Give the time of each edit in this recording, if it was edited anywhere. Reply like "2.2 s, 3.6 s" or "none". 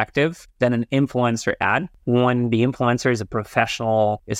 1.9 s

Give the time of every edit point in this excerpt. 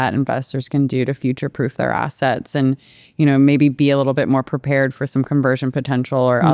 none

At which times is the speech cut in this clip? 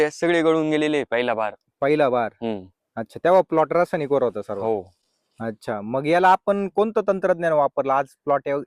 none

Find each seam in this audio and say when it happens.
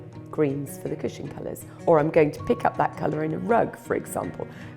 1.7 s

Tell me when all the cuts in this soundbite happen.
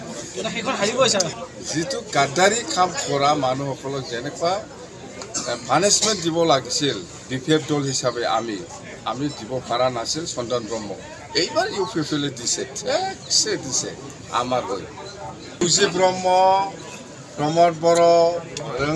1.4 s, 15.6 s

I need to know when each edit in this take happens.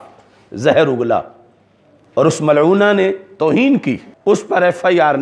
4.1 s

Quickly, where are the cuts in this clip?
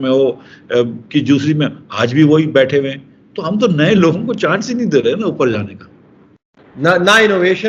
none

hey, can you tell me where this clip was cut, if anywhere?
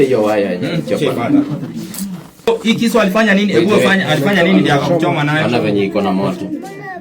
2.5 s

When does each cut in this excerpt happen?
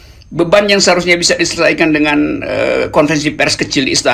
none

